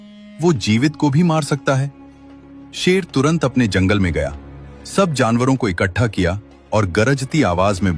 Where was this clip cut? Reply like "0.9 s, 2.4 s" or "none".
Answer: none